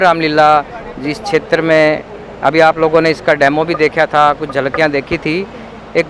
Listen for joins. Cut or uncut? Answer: uncut